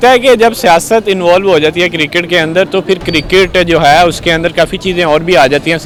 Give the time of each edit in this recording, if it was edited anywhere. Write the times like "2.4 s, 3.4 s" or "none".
none